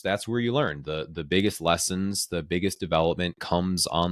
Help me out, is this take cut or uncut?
uncut